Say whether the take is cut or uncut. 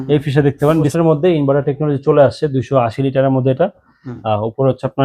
cut